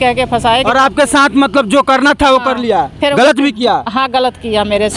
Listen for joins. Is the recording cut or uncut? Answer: uncut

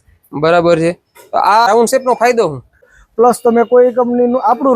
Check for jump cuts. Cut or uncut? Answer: cut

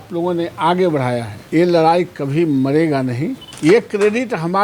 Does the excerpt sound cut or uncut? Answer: cut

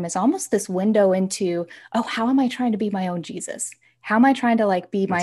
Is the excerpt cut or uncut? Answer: uncut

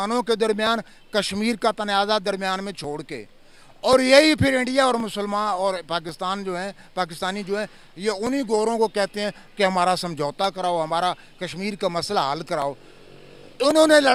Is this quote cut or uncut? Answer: uncut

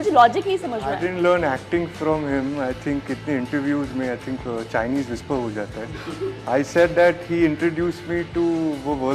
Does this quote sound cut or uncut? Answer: uncut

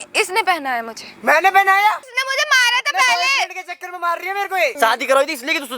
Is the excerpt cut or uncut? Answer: cut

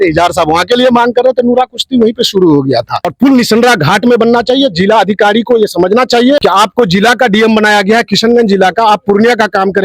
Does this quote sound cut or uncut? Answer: cut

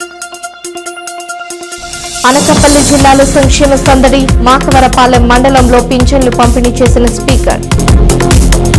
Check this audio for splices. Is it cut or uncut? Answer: cut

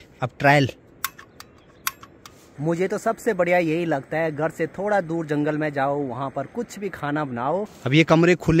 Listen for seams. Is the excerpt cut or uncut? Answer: cut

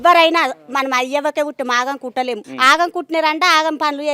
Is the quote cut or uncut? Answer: cut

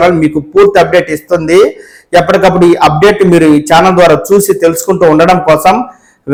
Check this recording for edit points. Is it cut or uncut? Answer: uncut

